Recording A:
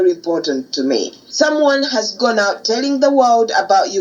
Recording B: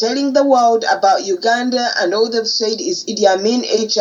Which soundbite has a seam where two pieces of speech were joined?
A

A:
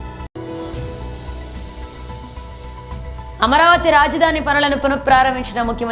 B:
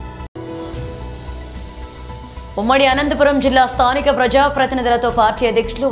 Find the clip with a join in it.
B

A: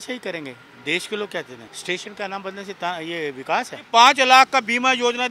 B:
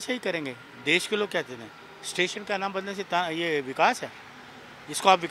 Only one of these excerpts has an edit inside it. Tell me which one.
A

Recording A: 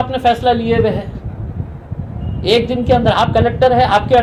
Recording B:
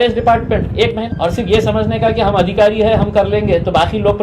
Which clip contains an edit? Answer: B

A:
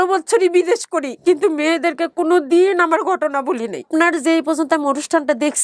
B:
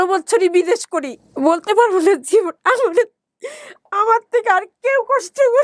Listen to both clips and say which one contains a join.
B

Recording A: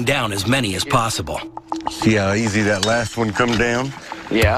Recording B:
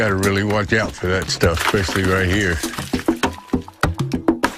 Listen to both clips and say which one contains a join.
A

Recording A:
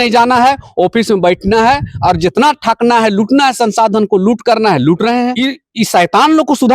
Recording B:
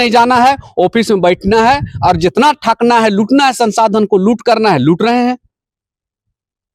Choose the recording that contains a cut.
A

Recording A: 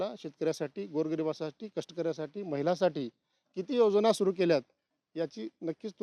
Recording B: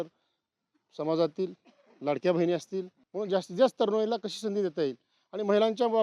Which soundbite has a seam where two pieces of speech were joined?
B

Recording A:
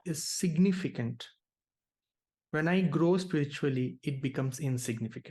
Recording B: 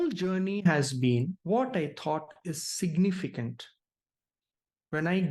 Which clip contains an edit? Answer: B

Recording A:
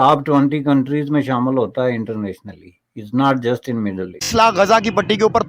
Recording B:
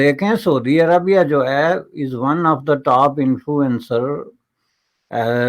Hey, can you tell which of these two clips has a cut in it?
A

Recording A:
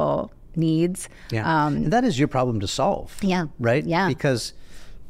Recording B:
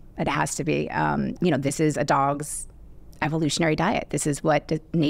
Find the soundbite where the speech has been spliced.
B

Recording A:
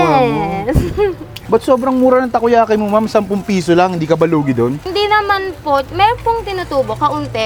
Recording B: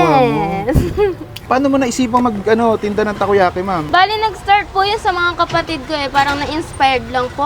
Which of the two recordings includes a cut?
B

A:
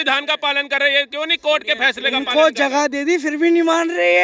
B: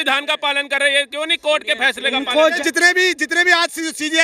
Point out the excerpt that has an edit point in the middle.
B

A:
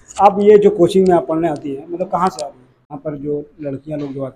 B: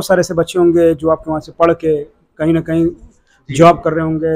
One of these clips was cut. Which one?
A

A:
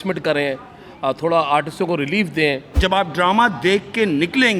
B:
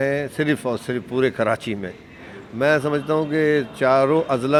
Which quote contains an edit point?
A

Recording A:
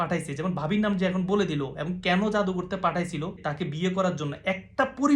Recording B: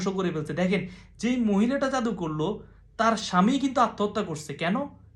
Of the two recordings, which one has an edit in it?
A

